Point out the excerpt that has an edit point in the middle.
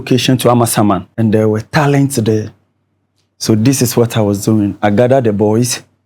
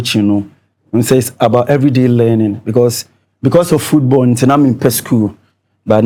first; 1 cut; at 1.1 s

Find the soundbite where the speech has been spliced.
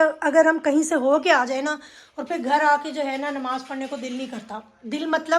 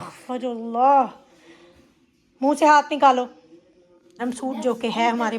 second; 1 cut; at 4.2 s

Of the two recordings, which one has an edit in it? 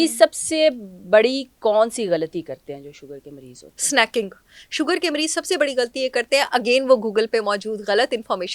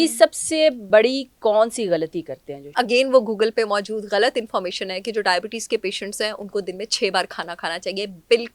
second; 2 cuts; at 0.8 s, 2.7 s

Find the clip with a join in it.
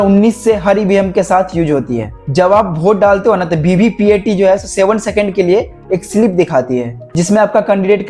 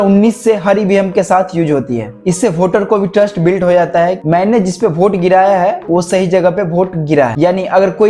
second; 2 cuts; at 2.1 s, 7.3 s

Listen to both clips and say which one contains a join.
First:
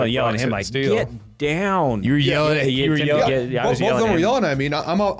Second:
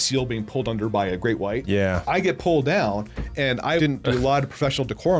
second; 2 cuts; at 1.6 s, 3.9 s

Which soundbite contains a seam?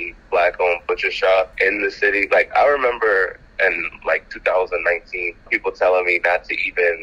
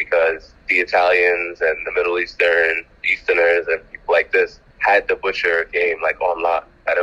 first; 1 cut; at 1.5 s

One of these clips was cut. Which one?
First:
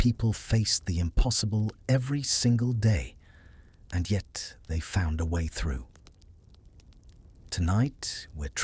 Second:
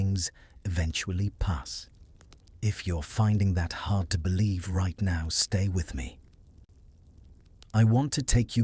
second; 2 cuts; at 6.2 s, 7.6 s

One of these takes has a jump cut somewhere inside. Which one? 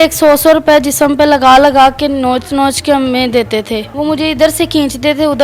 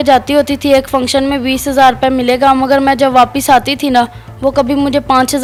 first; 1 cut; at 3.9 s

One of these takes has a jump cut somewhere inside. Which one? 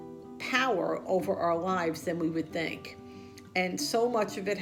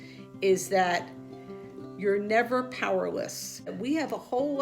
second; 1 cut; at 3.7 s

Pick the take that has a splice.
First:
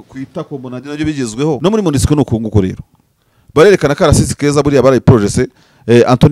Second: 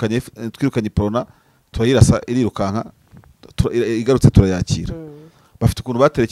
first; 1 cut; at 1.6 s

